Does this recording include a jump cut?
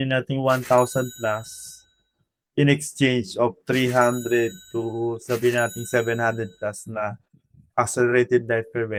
no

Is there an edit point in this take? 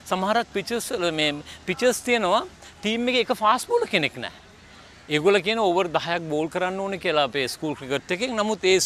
no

